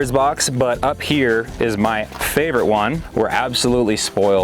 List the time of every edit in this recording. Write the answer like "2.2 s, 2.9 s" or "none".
2.0 s, 3.0 s